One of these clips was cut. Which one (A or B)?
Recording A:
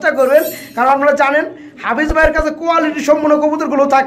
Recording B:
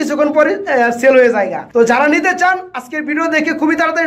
B